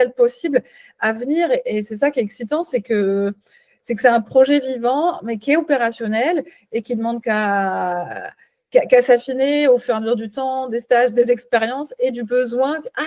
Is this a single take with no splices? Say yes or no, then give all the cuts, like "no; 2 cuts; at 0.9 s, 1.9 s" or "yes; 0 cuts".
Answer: yes; 0 cuts